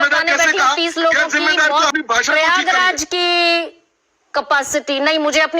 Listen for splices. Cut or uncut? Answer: cut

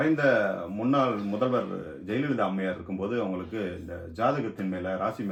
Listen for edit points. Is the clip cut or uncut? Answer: uncut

